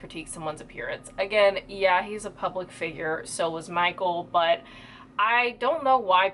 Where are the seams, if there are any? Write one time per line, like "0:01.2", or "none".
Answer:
none